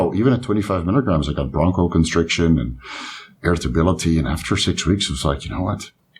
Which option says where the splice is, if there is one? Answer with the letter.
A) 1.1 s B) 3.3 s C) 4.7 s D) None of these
D